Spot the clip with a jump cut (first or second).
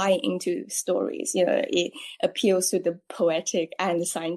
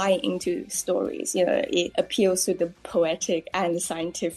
second